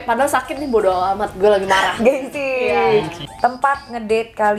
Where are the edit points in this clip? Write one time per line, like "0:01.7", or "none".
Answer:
0:03.2